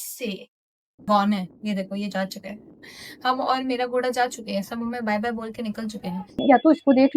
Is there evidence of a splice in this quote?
yes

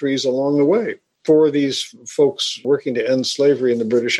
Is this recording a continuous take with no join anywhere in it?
no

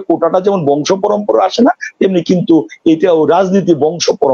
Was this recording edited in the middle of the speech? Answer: no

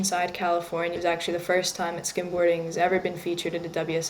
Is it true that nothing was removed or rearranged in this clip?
no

